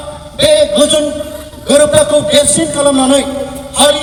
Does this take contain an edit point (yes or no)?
no